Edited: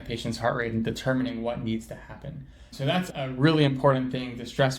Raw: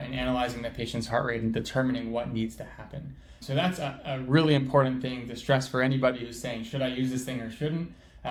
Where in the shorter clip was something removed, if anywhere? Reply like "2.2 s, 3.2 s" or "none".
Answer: 3.1 s